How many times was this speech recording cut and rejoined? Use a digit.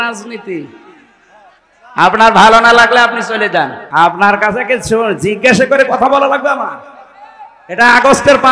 1